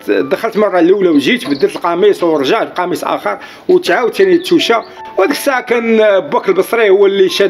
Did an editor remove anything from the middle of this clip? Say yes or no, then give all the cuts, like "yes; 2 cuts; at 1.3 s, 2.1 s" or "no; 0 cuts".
yes; 1 cut; at 5.0 s